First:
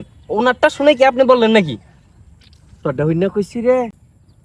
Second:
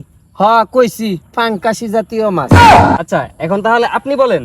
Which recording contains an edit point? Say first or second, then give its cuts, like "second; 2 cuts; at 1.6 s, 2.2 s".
second; 2 cuts; at 2.4 s, 3.0 s